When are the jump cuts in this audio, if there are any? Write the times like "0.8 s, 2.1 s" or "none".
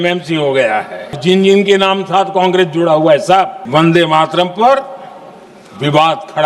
1.2 s, 3.6 s